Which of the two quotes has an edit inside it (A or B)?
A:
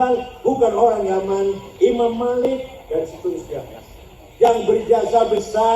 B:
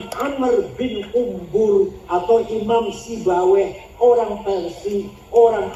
A